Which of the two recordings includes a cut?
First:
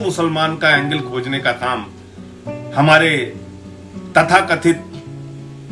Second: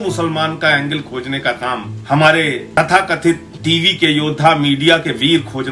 second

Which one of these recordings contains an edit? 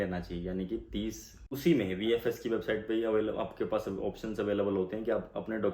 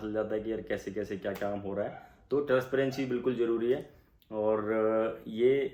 first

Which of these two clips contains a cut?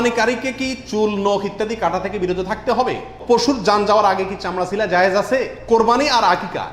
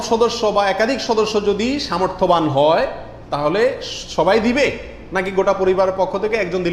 first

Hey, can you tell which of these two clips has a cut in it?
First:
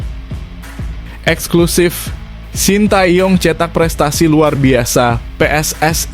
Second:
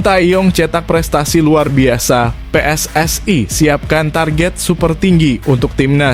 first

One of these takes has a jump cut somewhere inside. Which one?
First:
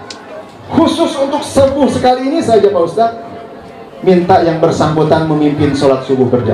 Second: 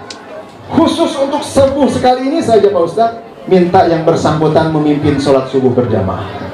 second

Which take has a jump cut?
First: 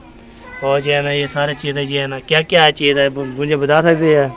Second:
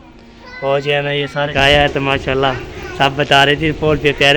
second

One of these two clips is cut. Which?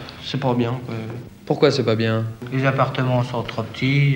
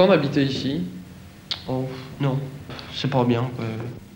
first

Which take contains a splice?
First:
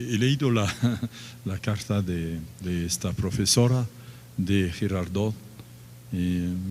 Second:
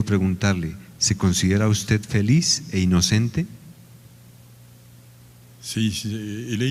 second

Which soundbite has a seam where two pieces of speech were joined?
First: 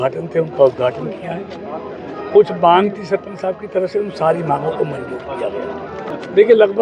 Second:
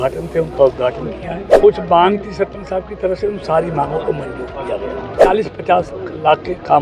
second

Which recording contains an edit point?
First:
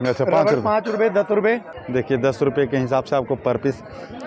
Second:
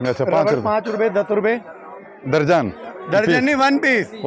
first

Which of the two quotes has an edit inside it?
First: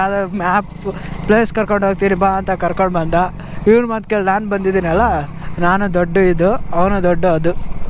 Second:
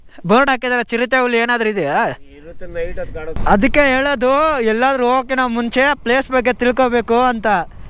second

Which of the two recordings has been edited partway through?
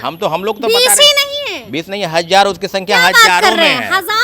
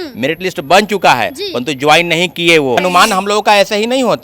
second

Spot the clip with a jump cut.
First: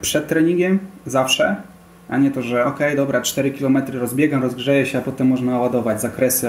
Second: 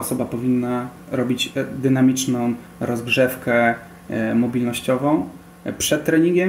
second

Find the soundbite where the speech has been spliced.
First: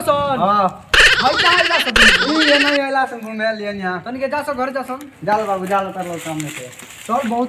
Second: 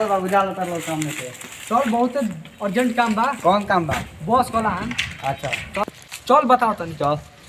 second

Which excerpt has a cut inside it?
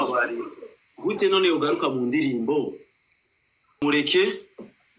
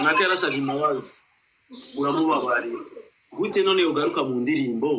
first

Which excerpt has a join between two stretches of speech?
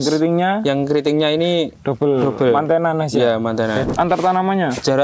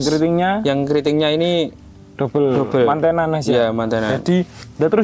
first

